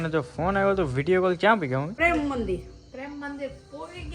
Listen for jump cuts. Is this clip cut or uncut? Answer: cut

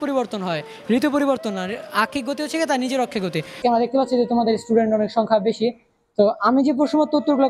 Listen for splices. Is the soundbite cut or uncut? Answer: cut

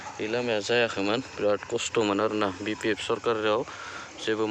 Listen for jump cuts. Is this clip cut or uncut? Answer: uncut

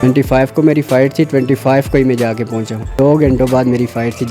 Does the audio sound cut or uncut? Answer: cut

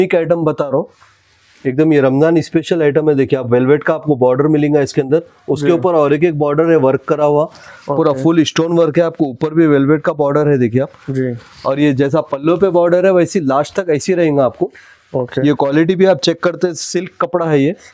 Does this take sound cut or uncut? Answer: uncut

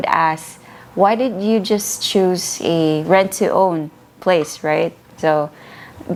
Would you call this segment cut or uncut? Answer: uncut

